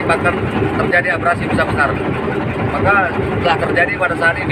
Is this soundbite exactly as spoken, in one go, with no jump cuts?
yes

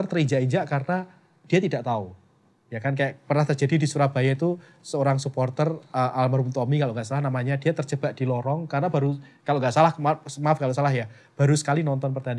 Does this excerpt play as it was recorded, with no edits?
yes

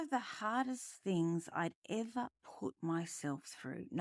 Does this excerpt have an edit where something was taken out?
no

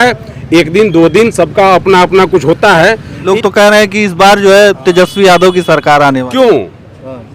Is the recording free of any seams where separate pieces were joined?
no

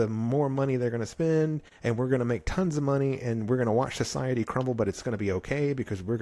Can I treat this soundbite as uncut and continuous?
no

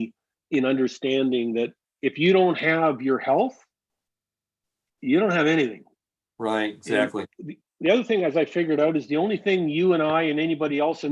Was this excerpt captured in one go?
yes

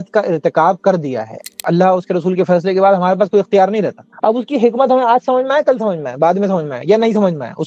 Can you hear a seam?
yes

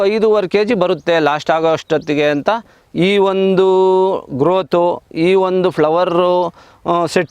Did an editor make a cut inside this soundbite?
no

